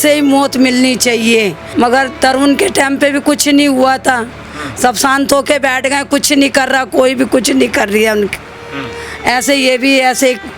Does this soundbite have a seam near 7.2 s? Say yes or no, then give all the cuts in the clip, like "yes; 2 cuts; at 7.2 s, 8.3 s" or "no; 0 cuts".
no; 1 cut; at 1.6 s